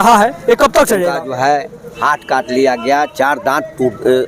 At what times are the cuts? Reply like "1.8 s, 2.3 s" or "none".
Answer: 1.1 s